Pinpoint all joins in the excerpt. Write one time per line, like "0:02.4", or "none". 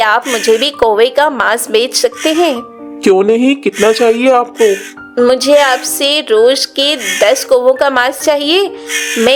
none